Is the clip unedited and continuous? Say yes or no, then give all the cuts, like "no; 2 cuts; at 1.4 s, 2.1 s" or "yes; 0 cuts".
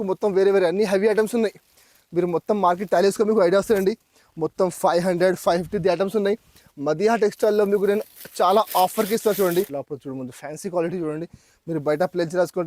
no; 1 cut; at 9.8 s